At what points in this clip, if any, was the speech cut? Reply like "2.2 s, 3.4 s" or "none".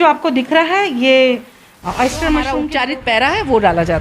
2.7 s